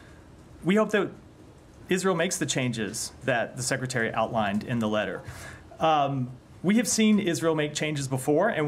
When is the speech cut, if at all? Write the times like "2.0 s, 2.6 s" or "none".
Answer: none